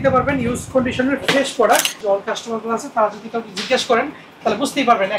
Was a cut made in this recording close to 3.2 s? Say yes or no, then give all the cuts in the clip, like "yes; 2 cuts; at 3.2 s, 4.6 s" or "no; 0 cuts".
no; 1 cut; at 1.9 s